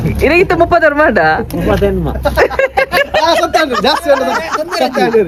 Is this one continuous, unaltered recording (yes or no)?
yes